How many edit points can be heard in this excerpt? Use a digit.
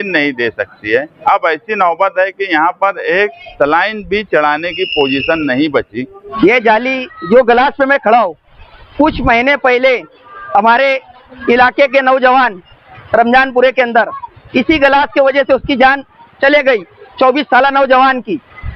2